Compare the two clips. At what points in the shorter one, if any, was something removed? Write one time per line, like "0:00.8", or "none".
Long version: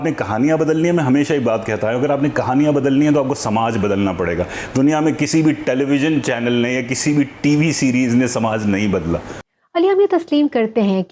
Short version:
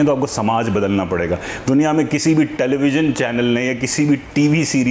none